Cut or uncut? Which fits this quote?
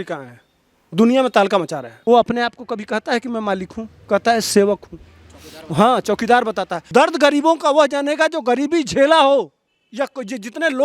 cut